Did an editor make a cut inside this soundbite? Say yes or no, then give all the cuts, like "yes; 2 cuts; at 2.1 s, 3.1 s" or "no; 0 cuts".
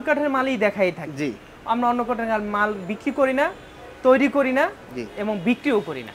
no; 0 cuts